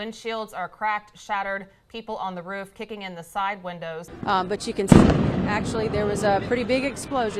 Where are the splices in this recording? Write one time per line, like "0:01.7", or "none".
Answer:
0:04.1